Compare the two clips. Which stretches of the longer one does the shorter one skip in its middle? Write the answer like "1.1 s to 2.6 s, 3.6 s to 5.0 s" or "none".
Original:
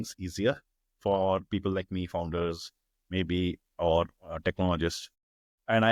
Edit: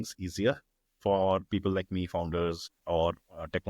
2.7 s to 3.6 s